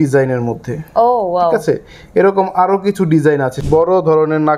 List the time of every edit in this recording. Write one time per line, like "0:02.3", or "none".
0:03.5